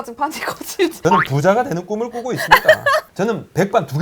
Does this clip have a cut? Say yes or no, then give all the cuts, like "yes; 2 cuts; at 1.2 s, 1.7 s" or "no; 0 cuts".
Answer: yes; 2 cuts; at 1.0 s, 3.1 s